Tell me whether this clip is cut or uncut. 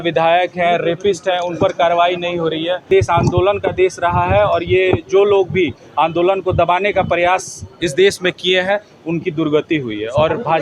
cut